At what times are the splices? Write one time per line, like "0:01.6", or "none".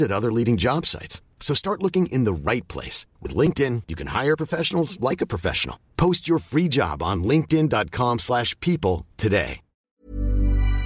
0:09.8